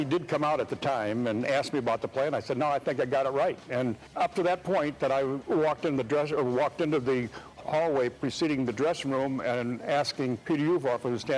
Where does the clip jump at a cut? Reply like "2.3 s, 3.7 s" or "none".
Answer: 4.0 s, 7.6 s, 10.4 s